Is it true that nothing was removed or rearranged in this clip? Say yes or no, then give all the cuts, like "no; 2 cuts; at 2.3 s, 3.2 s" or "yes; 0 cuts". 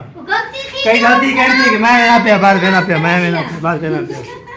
yes; 0 cuts